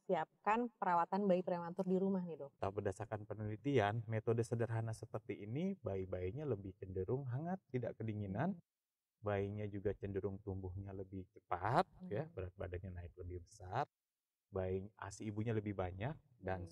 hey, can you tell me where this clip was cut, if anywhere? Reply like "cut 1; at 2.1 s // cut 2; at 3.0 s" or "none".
cut 1; at 2.5 s

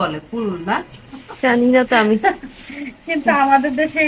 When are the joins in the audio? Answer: none

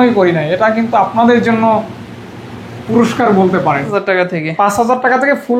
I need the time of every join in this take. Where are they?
cut 1; at 3.8 s

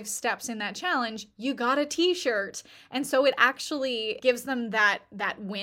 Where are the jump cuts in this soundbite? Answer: cut 1; at 4.2 s

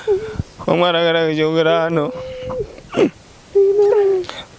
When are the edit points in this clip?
none

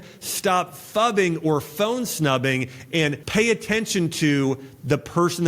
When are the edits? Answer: cut 1; at 3.2 s

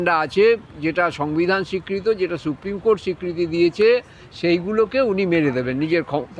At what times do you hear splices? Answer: none

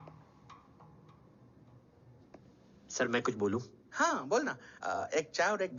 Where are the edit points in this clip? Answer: none

